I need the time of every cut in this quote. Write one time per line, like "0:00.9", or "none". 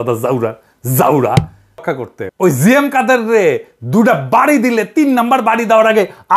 0:01.9